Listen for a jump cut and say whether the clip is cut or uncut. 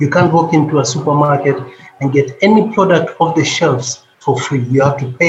uncut